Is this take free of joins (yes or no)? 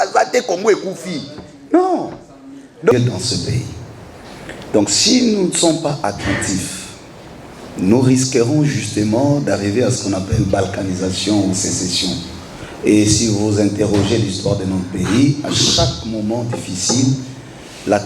no